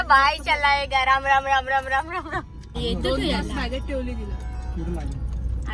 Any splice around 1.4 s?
no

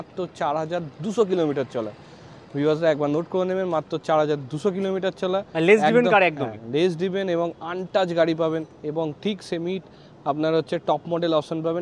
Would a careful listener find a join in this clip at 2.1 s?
no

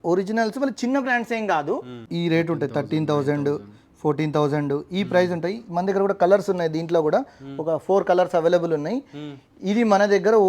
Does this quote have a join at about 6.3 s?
no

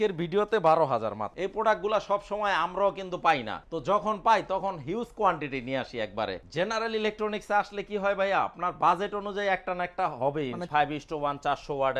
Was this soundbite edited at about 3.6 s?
no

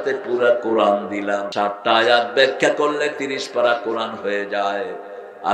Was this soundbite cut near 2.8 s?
no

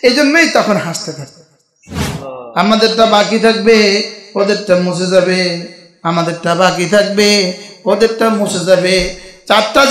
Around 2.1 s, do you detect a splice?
yes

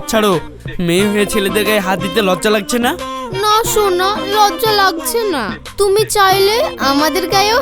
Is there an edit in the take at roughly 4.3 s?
no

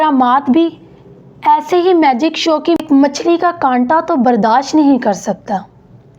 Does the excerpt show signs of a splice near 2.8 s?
yes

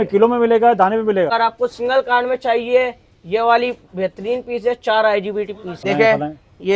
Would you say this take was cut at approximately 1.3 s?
yes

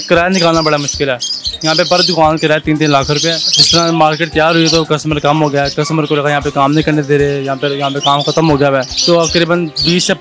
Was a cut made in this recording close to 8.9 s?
yes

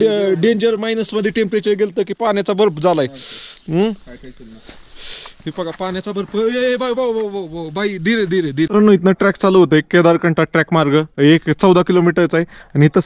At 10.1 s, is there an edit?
no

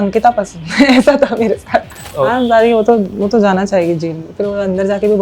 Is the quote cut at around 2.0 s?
yes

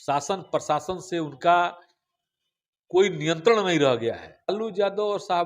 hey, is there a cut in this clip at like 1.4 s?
no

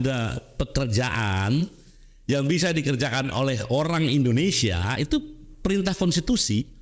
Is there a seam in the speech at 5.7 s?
no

